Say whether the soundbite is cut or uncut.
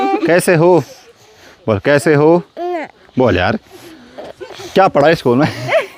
uncut